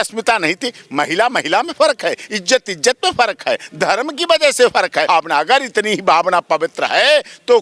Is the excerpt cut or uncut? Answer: cut